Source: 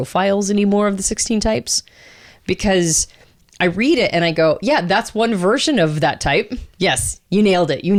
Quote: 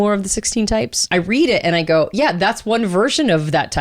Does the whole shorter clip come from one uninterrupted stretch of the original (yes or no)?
no